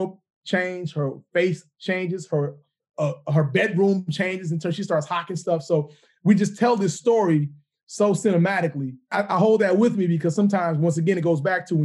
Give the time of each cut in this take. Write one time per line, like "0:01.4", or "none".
0:09.1